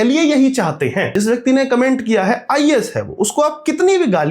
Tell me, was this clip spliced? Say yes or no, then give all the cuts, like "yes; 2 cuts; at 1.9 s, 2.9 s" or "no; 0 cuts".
yes; 1 cut; at 1.1 s